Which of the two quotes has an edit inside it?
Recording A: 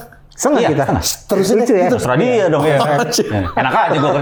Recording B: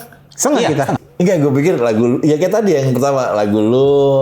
B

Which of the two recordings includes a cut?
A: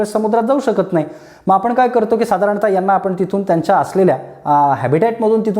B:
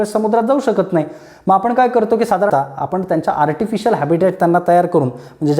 B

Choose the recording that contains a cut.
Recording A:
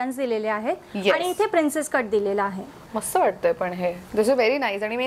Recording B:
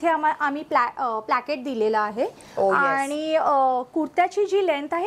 A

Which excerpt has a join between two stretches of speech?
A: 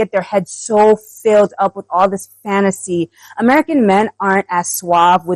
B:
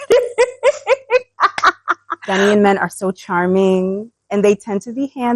B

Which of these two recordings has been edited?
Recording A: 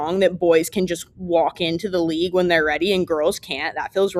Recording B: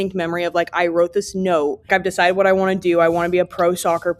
B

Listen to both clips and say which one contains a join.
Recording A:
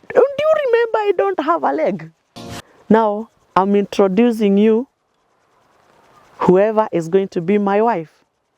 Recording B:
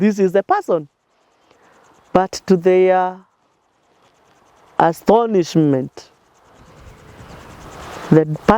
A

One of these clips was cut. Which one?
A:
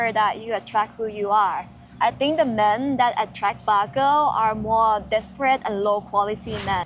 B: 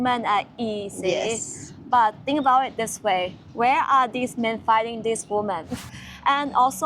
B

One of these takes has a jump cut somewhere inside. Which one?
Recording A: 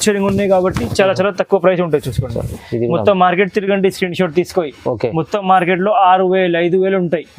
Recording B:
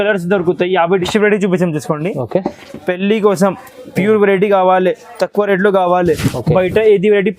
B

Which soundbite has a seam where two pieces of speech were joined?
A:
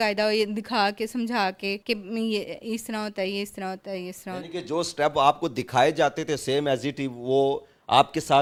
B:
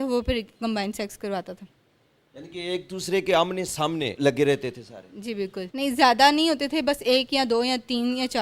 B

